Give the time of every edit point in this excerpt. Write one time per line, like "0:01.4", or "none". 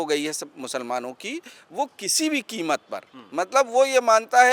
0:01.6